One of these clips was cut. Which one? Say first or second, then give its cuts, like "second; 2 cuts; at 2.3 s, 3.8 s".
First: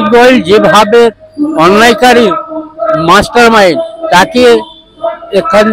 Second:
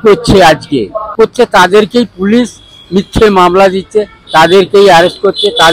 second; 1 cut; at 1.1 s